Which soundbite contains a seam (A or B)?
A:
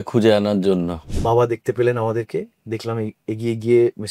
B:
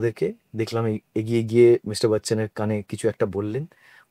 A